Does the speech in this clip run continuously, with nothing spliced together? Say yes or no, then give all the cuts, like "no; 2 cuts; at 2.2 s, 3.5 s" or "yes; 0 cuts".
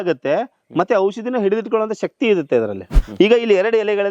no; 1 cut; at 3.0 s